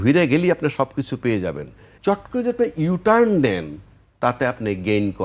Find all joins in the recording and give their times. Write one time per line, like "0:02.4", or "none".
0:01.9